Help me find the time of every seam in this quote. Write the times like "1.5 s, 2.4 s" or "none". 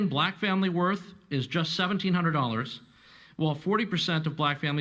1.1 s